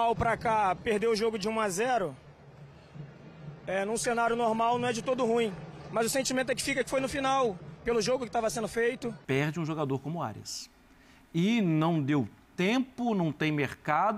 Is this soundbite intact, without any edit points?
no; 1 cut; at 9.1 s

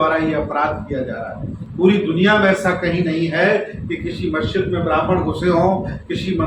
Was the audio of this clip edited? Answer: no; 0 cuts

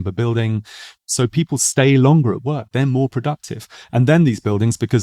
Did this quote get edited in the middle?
yes; 1 cut; at 1.0 s

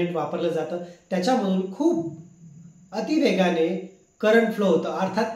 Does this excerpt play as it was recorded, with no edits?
yes; 0 cuts

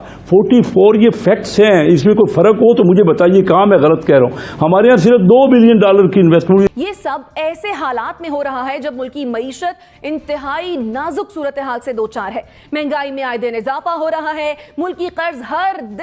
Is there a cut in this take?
yes; 1 cut; at 6.7 s

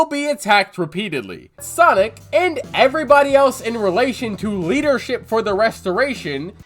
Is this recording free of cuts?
no; 1 cut; at 1.6 s

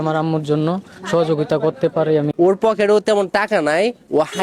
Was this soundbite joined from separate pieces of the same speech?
yes; 1 cut; at 2.3 s

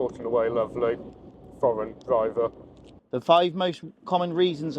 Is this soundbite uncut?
no; 1 cut; at 3.0 s

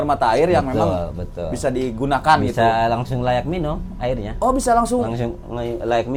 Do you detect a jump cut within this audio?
no; 0 cuts

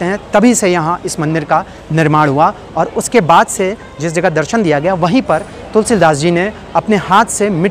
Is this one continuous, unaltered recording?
yes; 0 cuts

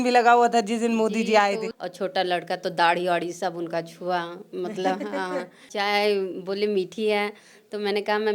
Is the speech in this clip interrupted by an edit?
yes; 2 cuts; at 1.7 s, 5.7 s

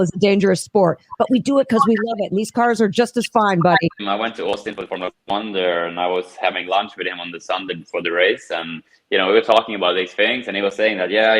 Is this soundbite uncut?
no; 1 cut; at 4.0 s

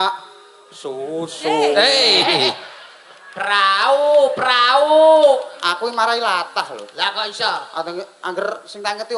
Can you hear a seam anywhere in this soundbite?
no; 0 cuts

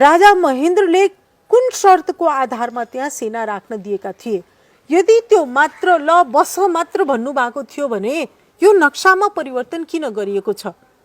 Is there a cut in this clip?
no; 0 cuts

